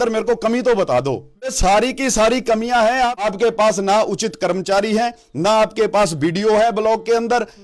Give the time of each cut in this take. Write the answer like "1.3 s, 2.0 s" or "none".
1.5 s, 3.3 s